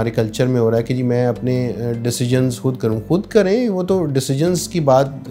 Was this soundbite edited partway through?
no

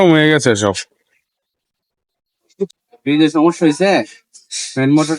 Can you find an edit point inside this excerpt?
yes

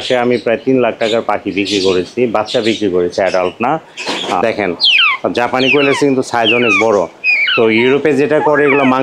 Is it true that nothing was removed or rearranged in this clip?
no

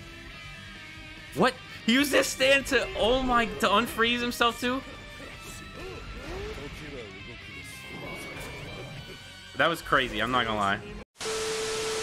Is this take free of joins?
no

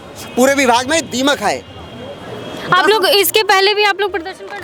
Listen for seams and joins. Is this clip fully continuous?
yes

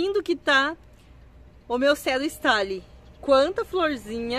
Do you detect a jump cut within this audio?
no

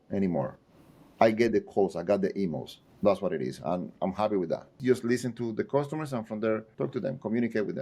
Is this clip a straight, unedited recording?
no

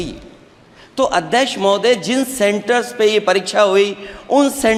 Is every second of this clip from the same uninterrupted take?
yes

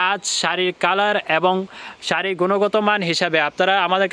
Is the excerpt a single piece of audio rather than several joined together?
yes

